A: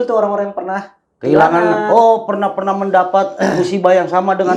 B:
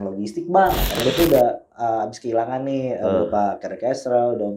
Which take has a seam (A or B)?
B